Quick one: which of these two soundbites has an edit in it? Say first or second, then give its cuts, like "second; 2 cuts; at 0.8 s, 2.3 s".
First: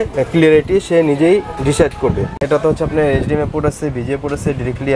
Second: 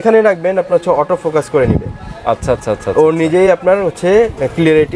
first; 1 cut; at 2.4 s